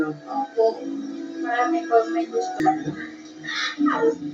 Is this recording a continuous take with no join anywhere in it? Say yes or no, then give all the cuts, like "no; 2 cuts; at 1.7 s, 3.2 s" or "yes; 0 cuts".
no; 1 cut; at 2.6 s